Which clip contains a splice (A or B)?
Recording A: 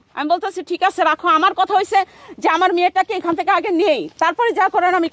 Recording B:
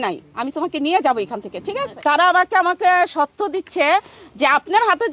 B